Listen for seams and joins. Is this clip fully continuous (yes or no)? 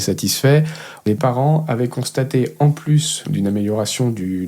no